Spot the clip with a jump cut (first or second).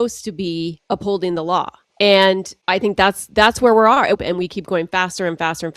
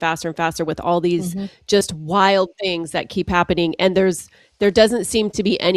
first